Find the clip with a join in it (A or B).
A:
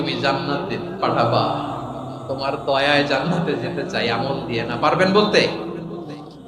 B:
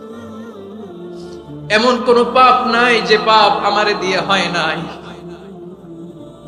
B